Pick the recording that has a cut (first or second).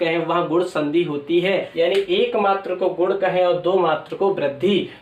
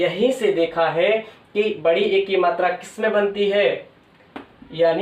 first